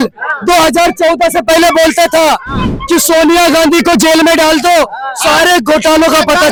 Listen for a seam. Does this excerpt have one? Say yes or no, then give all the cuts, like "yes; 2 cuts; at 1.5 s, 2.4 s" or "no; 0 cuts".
no; 0 cuts